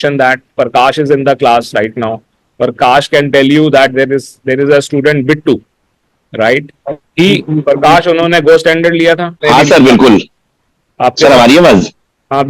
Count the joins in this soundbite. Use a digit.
1